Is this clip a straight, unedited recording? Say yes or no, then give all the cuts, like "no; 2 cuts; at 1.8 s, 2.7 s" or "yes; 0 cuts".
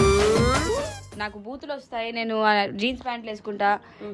no; 1 cut; at 1.0 s